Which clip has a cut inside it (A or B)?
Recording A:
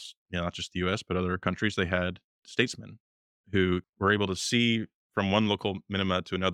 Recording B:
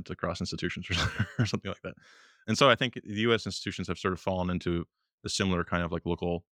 A